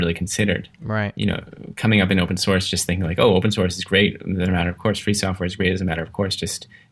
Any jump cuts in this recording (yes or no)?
no